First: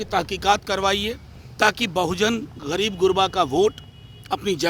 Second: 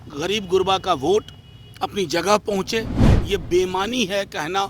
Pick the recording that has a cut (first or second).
second